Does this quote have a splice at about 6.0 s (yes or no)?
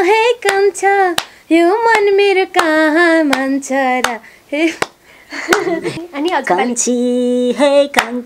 yes